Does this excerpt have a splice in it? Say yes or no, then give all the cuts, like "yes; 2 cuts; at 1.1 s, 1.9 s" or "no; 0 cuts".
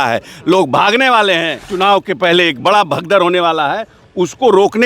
yes; 1 cut; at 1.6 s